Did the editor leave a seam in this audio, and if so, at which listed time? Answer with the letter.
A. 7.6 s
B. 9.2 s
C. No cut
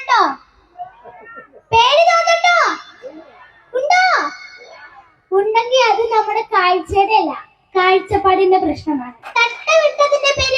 B